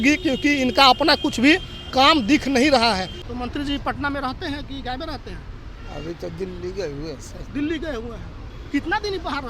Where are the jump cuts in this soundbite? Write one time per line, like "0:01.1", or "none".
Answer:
0:03.1